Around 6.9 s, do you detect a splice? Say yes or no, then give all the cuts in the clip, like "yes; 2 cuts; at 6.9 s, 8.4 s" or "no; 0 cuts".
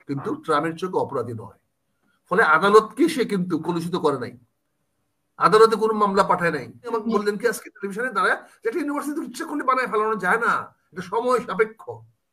yes; 1 cut; at 6.9 s